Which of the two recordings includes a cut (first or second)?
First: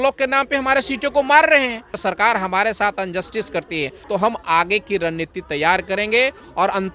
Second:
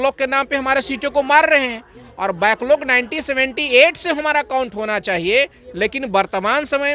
first